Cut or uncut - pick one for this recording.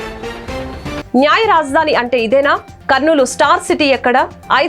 cut